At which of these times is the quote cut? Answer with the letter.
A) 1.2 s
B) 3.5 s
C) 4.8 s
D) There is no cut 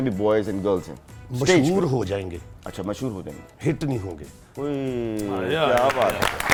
D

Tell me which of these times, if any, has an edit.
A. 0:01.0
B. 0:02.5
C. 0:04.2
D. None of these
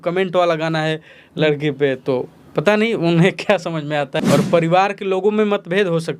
C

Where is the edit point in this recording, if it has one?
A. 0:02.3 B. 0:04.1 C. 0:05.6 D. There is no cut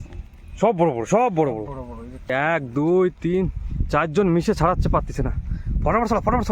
A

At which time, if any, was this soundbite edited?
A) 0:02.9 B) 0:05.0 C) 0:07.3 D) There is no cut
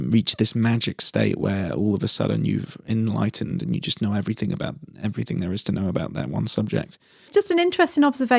C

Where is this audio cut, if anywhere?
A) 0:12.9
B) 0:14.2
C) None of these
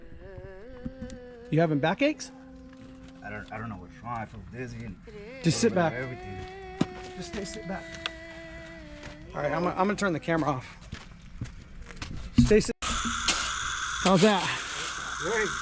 A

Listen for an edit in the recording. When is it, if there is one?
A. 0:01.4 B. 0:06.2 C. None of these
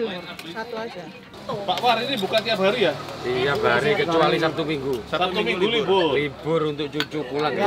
A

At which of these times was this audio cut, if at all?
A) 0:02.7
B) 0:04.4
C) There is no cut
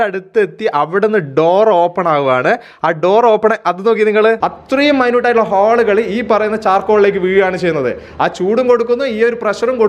B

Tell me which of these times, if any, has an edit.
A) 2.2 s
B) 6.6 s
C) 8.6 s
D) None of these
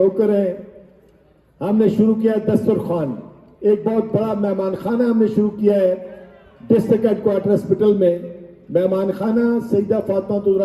D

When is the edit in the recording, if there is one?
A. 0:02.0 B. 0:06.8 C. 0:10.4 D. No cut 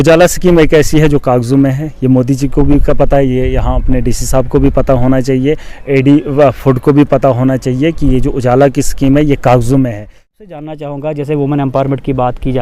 C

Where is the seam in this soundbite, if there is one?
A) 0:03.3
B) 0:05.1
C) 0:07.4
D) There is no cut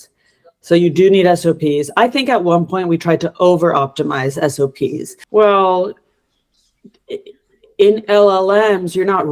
B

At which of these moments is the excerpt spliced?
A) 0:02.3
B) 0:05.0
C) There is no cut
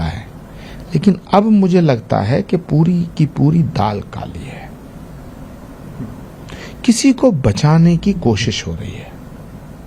C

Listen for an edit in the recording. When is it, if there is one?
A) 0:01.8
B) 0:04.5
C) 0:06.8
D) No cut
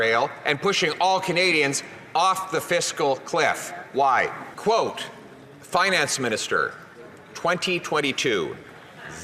B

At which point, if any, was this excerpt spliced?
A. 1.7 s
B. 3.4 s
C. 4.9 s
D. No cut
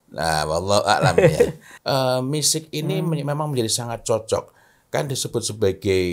A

